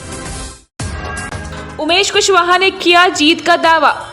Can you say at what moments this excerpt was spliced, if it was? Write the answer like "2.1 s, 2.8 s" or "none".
1.2 s